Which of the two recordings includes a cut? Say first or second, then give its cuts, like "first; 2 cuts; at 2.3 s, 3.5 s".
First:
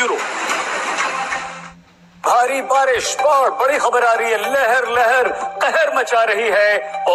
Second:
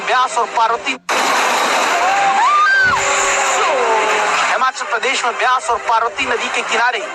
second; 1 cut; at 1.0 s